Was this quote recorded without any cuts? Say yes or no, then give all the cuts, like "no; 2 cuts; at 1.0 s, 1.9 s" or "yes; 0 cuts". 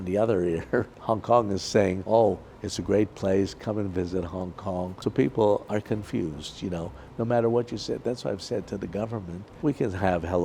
no; 4 cuts; at 0.9 s, 2.0 s, 4.9 s, 9.4 s